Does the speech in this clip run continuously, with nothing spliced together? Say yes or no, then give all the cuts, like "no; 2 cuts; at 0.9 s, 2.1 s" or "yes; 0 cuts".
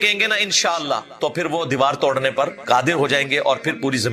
no; 2 cuts; at 1.1 s, 2.6 s